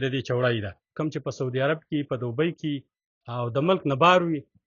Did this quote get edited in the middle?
yes; 1 cut; at 0.9 s

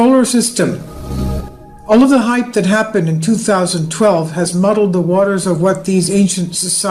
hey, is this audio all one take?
yes; 0 cuts

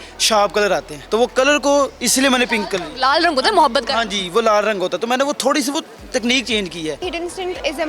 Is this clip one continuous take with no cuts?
no; 2 cuts; at 0.9 s, 7.0 s

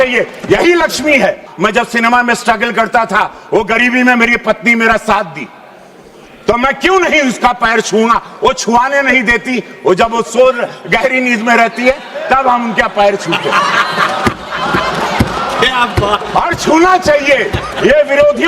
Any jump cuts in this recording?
yes; 1 cut; at 1.5 s

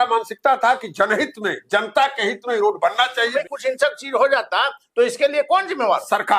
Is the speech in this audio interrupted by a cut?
yes; 1 cut; at 3.3 s

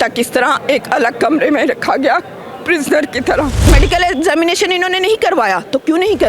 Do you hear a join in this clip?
yes; 1 cut; at 3.6 s

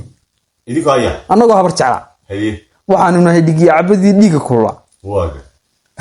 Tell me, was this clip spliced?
no; 0 cuts

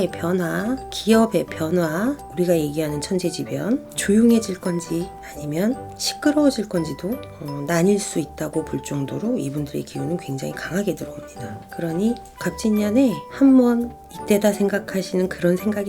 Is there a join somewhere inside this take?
yes; 2 cuts; at 2.2 s, 3.9 s

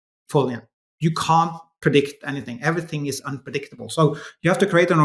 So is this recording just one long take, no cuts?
yes; 0 cuts

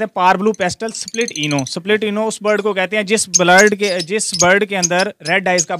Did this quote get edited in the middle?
no; 0 cuts

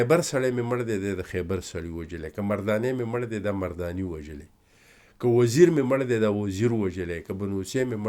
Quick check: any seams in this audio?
no; 0 cuts

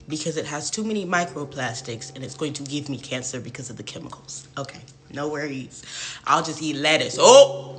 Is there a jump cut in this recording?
yes; 1 cut; at 5.8 s

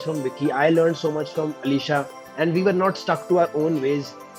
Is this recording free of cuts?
yes; 0 cuts

